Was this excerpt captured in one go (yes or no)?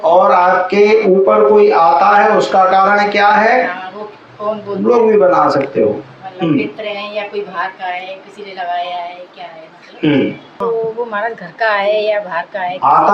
no